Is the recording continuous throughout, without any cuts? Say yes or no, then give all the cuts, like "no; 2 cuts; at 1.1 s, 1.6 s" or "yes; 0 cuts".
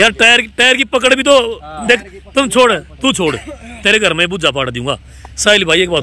yes; 0 cuts